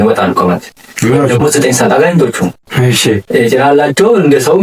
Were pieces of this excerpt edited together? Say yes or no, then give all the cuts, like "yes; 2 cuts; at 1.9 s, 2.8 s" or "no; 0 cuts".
no; 0 cuts